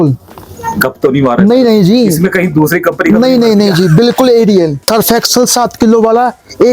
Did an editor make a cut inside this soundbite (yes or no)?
yes